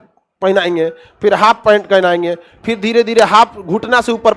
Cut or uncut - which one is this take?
uncut